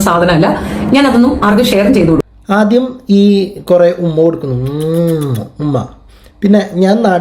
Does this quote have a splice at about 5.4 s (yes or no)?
no